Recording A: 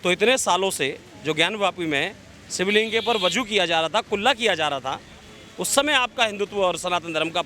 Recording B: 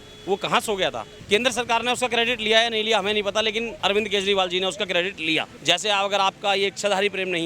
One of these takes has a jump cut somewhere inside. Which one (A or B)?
B